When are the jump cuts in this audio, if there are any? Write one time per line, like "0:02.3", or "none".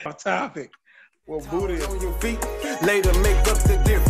0:02.1